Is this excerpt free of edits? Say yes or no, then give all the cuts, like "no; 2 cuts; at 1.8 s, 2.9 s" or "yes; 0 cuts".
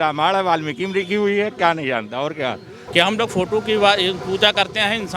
no; 1 cut; at 2.7 s